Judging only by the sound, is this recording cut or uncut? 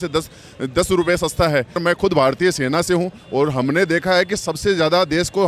cut